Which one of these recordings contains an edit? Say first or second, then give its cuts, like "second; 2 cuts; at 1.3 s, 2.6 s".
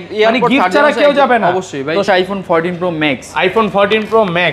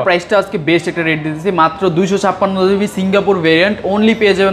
first; 1 cut; at 2.1 s